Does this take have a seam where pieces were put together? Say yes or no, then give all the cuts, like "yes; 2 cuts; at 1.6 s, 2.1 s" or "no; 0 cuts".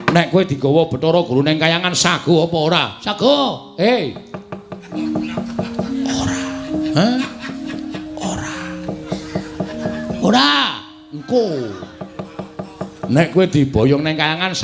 yes; 1 cut; at 5.0 s